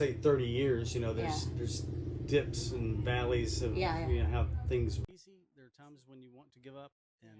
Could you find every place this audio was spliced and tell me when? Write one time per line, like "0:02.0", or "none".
0:05.1